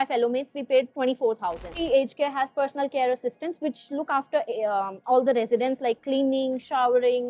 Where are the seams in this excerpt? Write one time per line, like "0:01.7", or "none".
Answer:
0:01.8